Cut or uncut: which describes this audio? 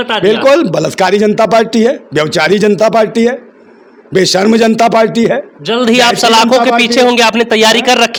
uncut